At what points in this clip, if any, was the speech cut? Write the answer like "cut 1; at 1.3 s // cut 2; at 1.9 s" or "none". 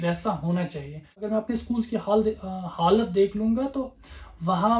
cut 1; at 1.3 s